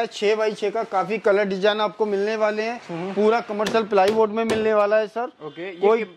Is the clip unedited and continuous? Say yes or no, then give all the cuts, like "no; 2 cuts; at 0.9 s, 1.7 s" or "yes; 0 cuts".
yes; 0 cuts